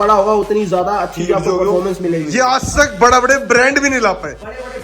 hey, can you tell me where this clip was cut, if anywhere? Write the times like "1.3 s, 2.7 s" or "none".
2.3 s